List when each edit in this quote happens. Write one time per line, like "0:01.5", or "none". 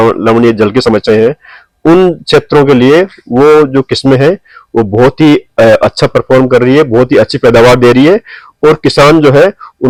none